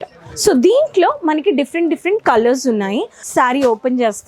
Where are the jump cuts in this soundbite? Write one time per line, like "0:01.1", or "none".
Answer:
0:03.2